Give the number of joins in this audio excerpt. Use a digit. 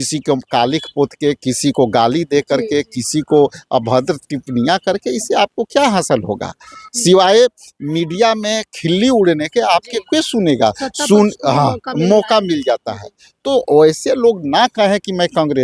0